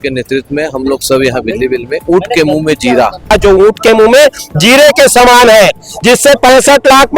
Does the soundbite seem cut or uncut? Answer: cut